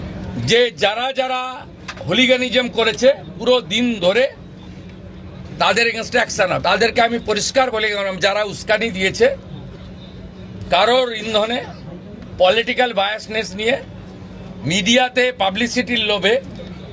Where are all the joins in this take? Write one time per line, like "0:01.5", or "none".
0:06.6